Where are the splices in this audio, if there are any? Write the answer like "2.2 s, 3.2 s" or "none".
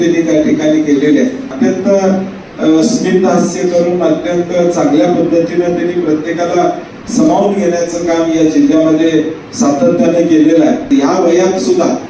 1.5 s, 10.8 s